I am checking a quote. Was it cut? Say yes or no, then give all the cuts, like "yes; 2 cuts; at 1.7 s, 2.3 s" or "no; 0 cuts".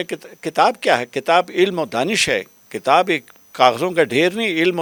no; 0 cuts